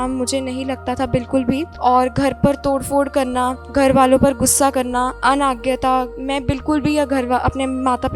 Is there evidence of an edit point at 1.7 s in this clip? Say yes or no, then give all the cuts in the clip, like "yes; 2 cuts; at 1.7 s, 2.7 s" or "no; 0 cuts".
yes; 4 cuts; at 1.7 s, 3.6 s, 5.1 s, 6.2 s